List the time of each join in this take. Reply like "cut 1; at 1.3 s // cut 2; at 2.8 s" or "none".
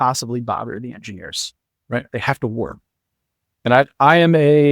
none